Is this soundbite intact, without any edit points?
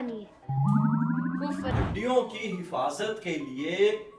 no; 1 cut; at 1.7 s

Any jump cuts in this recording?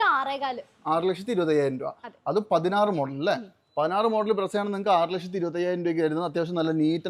no; 0 cuts

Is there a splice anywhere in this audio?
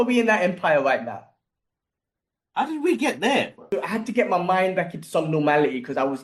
yes; 1 cut; at 3.6 s

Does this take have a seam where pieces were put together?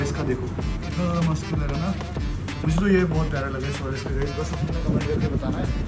no; 0 cuts

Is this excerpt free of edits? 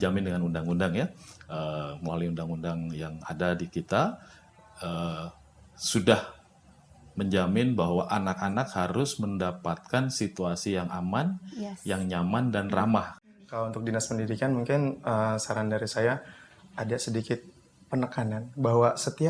no; 1 cut; at 13.2 s

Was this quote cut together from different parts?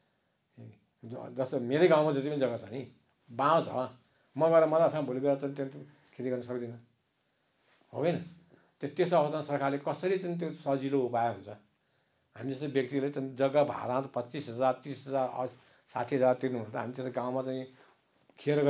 no; 0 cuts

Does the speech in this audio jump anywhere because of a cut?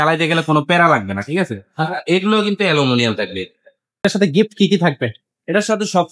yes; 1 cut; at 4.0 s

